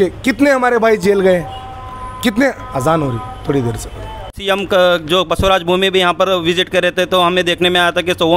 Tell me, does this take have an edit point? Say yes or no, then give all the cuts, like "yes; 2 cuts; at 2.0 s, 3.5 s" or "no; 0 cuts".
yes; 1 cut; at 4.3 s